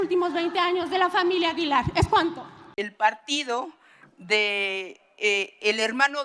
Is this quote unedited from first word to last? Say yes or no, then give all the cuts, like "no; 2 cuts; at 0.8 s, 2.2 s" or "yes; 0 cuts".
no; 1 cut; at 2.6 s